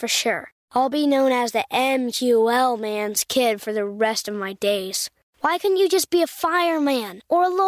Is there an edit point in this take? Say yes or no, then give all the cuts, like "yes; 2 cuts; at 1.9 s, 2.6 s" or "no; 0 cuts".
no; 0 cuts